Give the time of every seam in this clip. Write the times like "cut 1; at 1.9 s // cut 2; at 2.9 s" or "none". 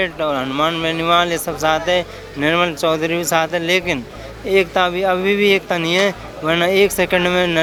none